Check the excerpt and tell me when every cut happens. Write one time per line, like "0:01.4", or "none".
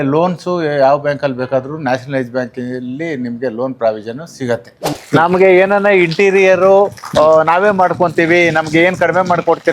0:04.9